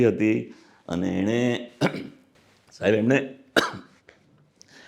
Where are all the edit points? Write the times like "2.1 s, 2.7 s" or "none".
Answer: none